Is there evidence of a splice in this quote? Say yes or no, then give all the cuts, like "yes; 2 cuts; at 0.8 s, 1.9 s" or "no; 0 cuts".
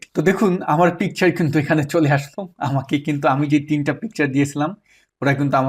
no; 0 cuts